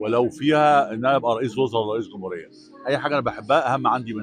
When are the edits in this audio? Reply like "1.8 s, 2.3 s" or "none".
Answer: none